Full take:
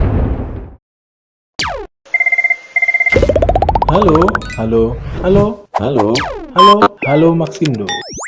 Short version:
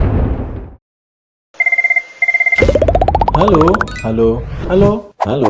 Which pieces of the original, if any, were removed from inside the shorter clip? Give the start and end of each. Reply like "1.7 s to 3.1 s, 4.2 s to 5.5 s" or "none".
1.4 s to 2.0 s